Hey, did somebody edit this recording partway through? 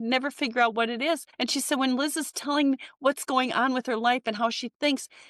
yes; 1 cut; at 1.3 s

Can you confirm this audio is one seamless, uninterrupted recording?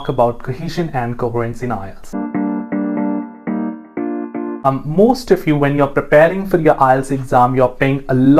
no; 2 cuts; at 2.1 s, 4.7 s

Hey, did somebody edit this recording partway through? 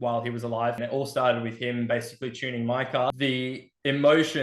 yes; 2 cuts; at 0.8 s, 3.1 s

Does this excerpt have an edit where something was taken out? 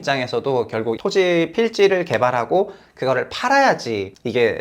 yes; 1 cut; at 0.9 s

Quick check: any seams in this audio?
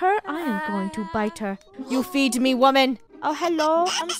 yes; 1 cut; at 3.1 s

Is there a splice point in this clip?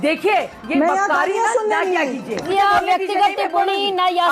yes; 1 cut; at 2.5 s

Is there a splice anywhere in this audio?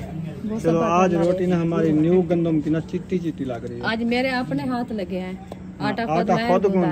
no; 0 cuts

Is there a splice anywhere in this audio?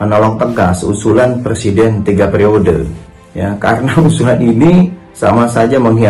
no; 0 cuts

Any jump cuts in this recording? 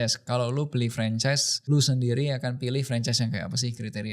yes; 1 cut; at 1.5 s

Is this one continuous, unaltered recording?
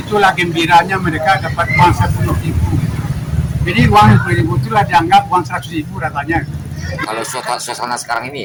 yes; 0 cuts

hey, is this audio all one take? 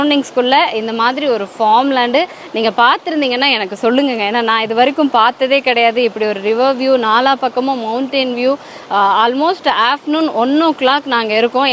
yes; 0 cuts

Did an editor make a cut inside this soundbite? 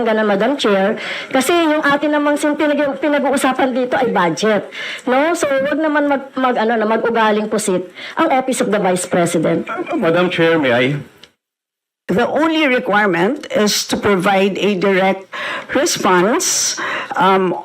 no; 0 cuts

